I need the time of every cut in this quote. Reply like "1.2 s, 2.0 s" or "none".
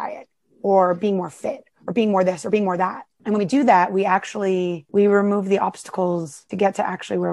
3.1 s, 4.8 s, 6.4 s